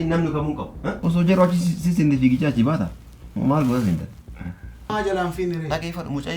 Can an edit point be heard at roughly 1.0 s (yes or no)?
yes